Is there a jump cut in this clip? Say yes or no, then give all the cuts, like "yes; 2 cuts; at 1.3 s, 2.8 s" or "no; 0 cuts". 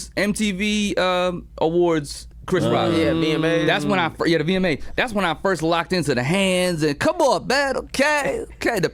no; 0 cuts